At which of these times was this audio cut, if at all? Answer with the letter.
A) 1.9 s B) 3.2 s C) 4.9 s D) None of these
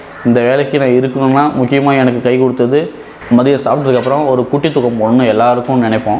B